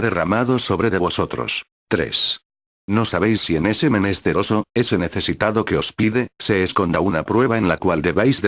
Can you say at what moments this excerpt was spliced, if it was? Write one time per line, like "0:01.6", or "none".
0:05.0